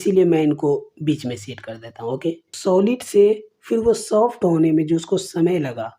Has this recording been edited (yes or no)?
yes